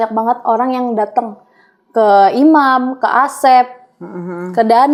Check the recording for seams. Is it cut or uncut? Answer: uncut